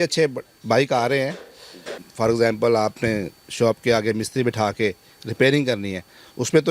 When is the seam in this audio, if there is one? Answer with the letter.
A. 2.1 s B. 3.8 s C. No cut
A